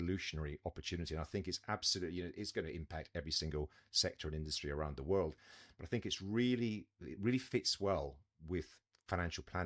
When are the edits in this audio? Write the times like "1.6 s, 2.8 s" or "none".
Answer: none